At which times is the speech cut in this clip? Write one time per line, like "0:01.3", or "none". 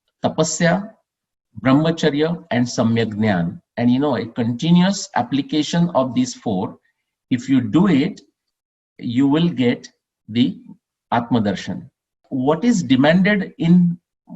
0:12.2